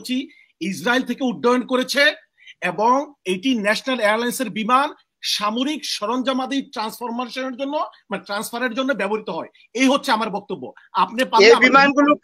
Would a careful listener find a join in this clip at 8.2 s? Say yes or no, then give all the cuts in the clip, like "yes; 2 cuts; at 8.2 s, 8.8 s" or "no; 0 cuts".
no; 0 cuts